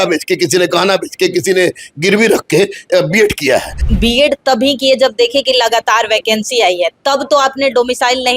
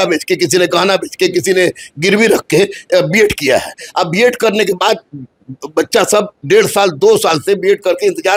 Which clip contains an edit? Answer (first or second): first